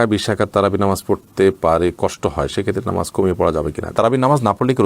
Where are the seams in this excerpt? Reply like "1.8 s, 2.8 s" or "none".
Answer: 3.9 s